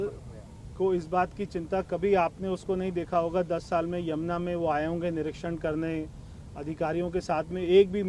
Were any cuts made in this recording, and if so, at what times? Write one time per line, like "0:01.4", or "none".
none